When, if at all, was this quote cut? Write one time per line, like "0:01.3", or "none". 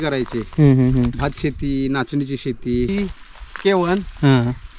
0:02.9